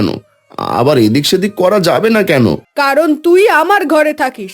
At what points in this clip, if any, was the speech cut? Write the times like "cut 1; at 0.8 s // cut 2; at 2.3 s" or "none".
cut 1; at 2.7 s

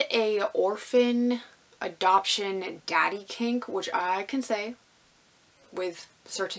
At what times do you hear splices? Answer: none

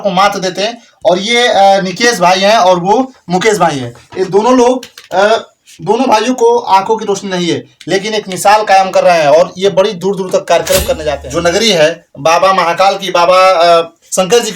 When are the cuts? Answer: cut 1; at 11.1 s

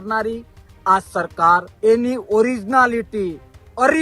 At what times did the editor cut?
cut 1; at 1.7 s

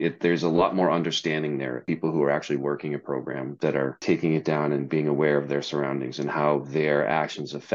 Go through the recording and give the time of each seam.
cut 1; at 1.8 s // cut 2; at 4.0 s

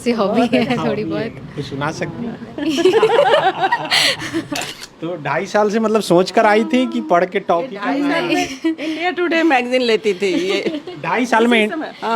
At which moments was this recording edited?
cut 1; at 4.6 s

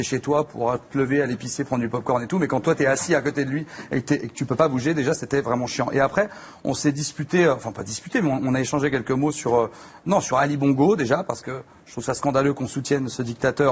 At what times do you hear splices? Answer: none

